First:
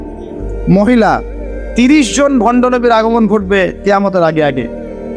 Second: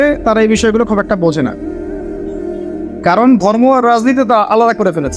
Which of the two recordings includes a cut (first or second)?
second